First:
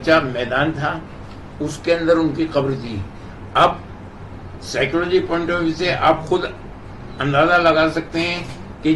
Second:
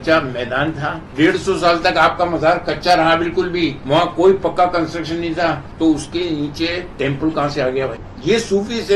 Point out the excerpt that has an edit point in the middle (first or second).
second